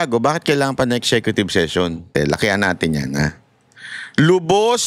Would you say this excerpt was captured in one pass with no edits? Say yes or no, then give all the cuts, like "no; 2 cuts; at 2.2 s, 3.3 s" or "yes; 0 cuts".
no; 1 cut; at 2.1 s